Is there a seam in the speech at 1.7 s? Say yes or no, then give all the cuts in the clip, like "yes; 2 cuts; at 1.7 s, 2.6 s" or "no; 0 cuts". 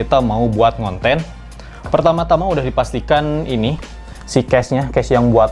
no; 0 cuts